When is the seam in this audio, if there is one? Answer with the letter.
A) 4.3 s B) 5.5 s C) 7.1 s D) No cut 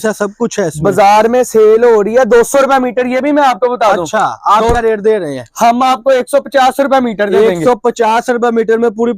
D